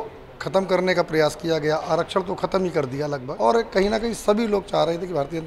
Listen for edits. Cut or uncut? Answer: cut